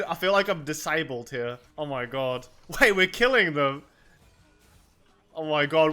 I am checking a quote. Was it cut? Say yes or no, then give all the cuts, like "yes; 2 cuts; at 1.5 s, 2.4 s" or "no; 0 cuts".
yes; 1 cut; at 1.6 s